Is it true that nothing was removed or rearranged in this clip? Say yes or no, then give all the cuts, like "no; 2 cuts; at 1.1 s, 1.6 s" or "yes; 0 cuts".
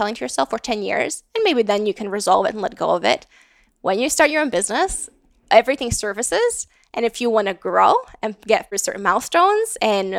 no; 1 cut; at 8.8 s